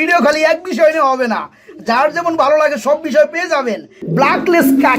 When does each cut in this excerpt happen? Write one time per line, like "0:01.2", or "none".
0:04.0